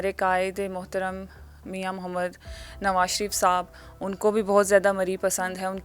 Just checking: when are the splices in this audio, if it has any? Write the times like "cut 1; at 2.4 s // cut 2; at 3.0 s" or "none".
none